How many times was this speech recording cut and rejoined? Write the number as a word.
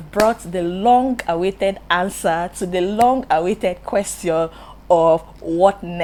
zero